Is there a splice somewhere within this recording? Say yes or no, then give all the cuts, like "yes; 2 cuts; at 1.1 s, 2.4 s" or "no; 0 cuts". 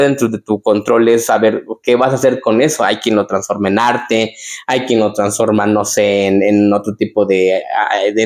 no; 0 cuts